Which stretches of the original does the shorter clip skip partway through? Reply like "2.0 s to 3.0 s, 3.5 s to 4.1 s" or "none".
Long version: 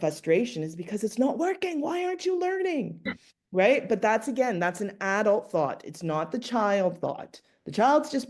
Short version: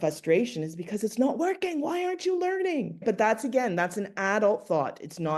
3.0 s to 3.8 s